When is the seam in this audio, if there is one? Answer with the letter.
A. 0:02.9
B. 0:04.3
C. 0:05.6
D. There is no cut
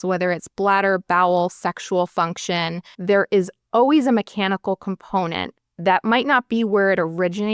A